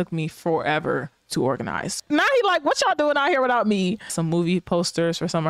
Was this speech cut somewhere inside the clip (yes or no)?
yes